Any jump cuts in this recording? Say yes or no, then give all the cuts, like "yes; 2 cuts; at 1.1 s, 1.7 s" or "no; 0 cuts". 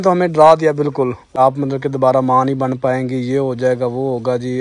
yes; 1 cut; at 1.3 s